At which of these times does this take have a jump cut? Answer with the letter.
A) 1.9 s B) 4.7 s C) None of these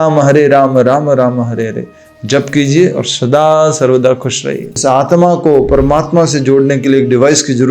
B